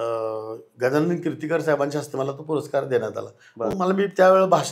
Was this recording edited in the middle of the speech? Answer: no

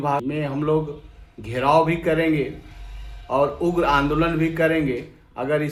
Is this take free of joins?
yes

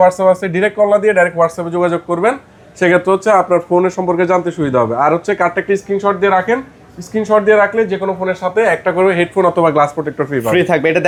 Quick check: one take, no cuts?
yes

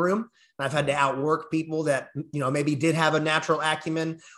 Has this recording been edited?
no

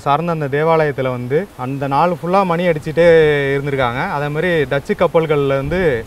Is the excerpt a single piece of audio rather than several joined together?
no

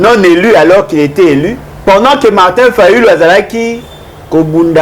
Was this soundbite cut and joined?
yes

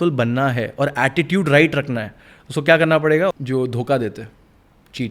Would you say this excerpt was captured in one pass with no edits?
no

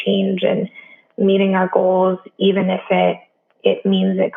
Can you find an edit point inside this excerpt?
no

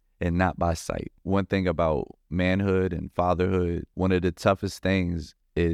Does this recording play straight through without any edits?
no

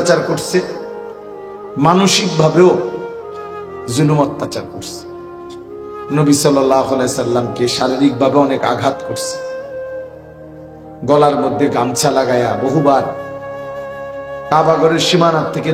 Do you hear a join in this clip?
no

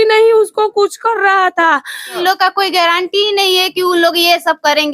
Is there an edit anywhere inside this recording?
yes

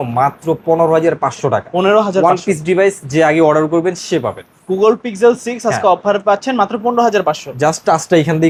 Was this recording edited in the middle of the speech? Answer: no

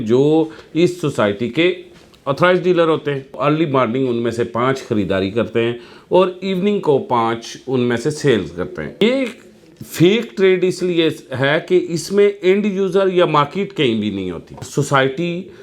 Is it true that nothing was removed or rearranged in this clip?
no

